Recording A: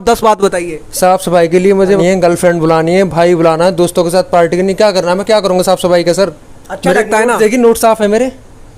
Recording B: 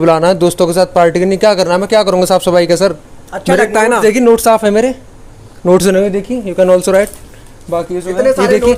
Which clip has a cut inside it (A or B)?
A